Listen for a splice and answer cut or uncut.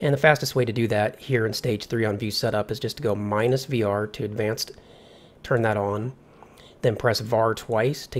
uncut